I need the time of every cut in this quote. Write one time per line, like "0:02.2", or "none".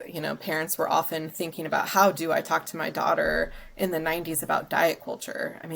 none